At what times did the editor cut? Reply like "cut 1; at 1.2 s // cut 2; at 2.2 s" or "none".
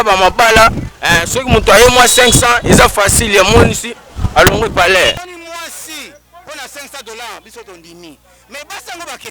cut 1; at 5.2 s